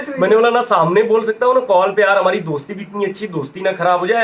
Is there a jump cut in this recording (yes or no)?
no